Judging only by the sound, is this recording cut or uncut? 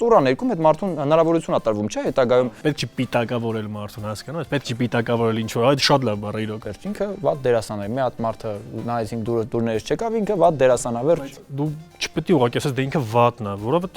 cut